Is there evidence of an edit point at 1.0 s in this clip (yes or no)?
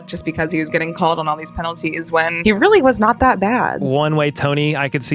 no